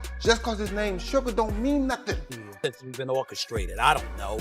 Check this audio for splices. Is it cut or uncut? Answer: cut